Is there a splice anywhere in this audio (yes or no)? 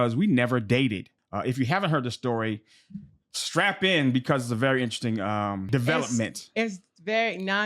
yes